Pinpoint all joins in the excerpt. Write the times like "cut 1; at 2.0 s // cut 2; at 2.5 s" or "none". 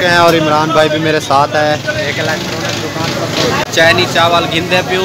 cut 1; at 3.6 s